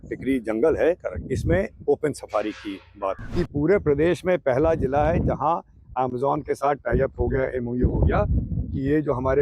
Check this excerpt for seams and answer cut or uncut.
cut